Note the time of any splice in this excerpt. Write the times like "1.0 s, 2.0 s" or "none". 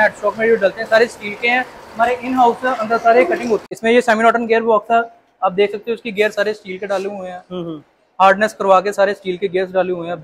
3.7 s